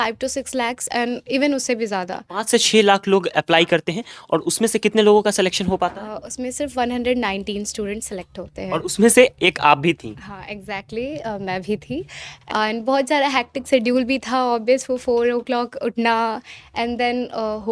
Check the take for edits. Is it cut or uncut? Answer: cut